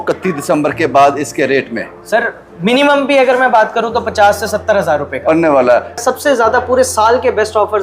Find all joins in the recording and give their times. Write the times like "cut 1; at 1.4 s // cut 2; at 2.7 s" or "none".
cut 1; at 6.0 s